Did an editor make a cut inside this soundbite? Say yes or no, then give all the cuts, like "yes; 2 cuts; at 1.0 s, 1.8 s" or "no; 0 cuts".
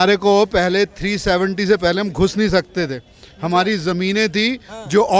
no; 0 cuts